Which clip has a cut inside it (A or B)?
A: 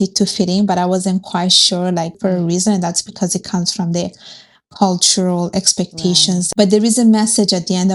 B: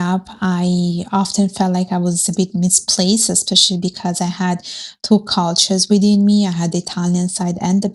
A